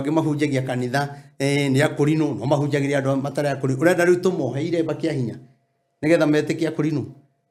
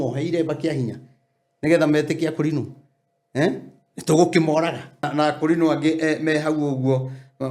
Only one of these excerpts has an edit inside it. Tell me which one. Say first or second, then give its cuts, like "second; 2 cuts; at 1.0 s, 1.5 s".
second; 1 cut; at 5.0 s